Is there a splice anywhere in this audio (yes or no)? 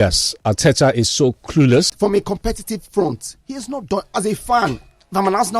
yes